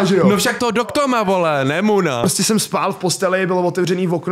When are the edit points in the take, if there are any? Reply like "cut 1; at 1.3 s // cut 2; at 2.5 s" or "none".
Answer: cut 1; at 2.2 s